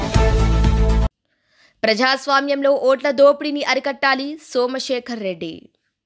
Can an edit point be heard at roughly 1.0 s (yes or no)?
yes